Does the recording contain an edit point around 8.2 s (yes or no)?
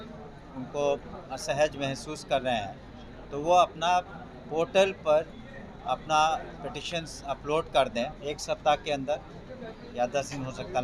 yes